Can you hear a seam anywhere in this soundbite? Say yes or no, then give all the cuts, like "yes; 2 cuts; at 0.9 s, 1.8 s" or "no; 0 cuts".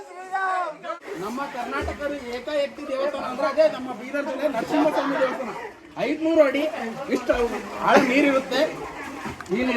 yes; 1 cut; at 1.1 s